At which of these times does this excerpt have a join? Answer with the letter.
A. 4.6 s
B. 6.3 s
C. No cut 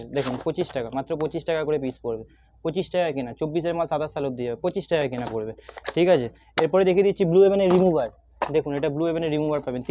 C